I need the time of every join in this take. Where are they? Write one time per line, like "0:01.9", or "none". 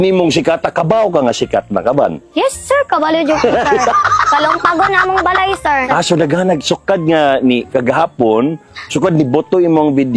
none

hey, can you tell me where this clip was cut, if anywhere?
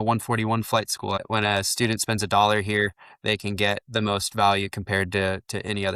0:01.2

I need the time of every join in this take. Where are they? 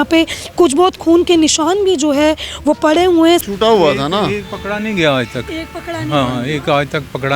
0:03.4

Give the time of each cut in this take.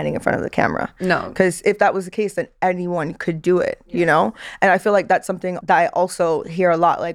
0:05.5

